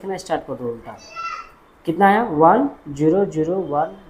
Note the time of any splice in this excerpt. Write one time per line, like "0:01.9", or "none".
none